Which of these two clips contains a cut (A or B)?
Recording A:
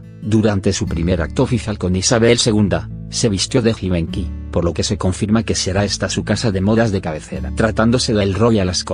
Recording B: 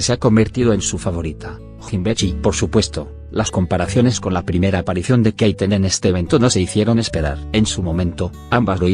B